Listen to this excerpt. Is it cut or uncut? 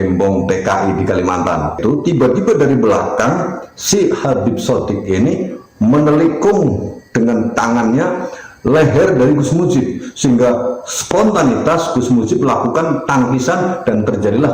cut